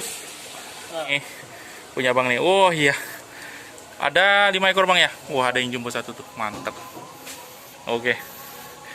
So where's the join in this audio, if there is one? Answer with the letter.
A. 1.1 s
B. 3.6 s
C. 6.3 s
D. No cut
A